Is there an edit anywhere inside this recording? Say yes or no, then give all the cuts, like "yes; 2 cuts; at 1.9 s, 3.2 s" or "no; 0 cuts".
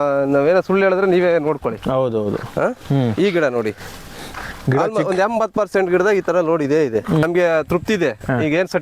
yes; 1 cut; at 7.2 s